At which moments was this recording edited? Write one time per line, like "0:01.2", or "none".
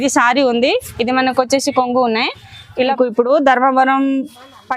0:02.9